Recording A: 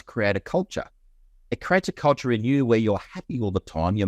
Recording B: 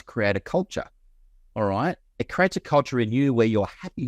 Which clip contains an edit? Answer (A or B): A